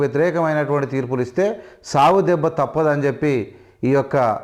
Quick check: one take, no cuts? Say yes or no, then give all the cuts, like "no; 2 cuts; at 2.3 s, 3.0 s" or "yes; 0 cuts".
yes; 0 cuts